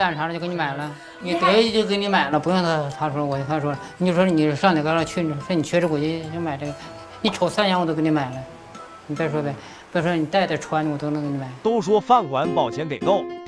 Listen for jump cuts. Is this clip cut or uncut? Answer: cut